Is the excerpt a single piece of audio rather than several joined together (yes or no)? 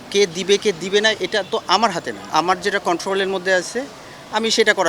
no